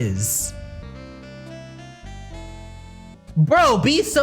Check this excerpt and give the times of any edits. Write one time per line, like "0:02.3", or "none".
0:00.8
0:03.2